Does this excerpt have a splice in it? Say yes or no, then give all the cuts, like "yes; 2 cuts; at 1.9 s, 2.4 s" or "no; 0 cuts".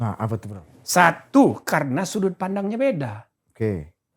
no; 0 cuts